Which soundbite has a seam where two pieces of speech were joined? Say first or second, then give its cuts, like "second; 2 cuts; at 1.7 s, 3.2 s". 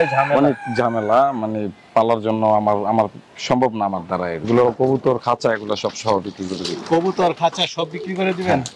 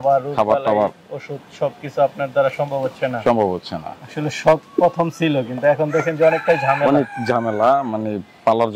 first; 1 cut; at 4.4 s